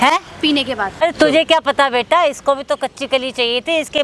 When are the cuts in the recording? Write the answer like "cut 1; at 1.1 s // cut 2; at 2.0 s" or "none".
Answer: cut 1; at 1.0 s